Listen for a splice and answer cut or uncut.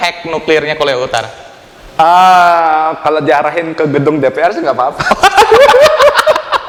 uncut